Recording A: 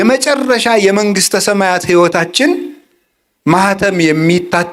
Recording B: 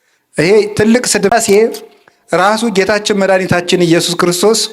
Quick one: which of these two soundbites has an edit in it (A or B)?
B